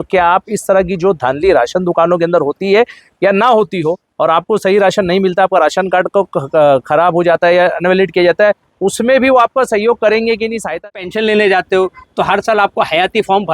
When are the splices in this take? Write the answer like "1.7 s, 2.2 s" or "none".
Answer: 10.8 s